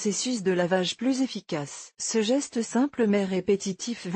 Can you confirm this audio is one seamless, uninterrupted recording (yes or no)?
yes